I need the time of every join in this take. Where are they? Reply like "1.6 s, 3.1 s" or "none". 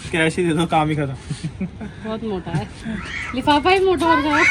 none